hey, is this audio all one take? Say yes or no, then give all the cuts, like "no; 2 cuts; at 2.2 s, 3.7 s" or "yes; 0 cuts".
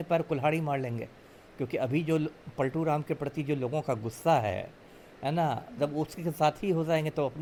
yes; 0 cuts